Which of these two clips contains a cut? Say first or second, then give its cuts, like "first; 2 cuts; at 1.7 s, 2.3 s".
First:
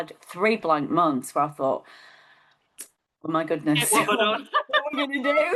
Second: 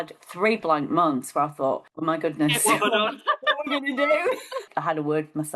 second; 2 cuts; at 1.9 s, 4.7 s